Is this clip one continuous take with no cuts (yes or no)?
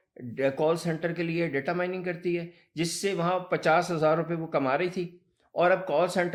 yes